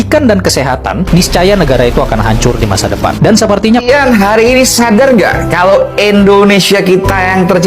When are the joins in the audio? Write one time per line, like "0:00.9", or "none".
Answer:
0:03.8

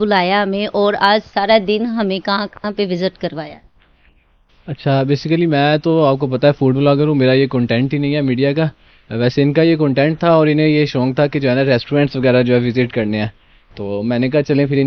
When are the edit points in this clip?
none

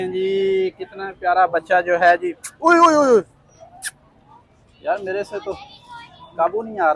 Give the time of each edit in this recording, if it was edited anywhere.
none

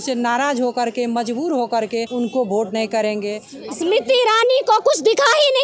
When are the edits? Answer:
0:02.1
0:03.5

